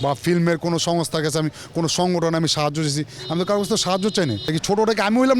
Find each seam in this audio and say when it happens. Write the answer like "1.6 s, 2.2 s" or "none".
4.4 s